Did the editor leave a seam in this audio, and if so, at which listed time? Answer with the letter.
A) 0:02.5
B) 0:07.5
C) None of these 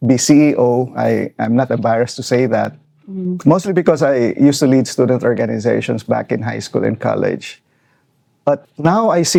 C